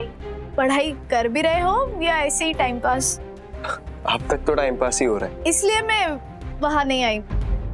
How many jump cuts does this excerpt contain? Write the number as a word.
one